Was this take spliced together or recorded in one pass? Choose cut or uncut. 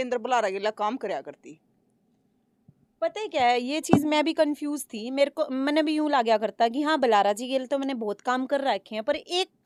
uncut